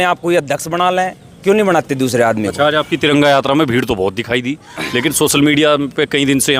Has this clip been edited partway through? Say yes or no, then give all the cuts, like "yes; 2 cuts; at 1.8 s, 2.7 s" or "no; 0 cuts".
no; 0 cuts